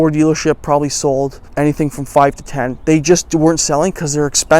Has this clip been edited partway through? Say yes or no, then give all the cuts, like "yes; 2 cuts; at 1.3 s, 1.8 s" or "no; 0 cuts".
yes; 1 cut; at 1.4 s